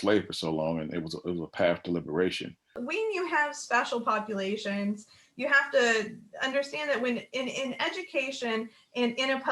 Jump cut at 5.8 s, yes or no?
no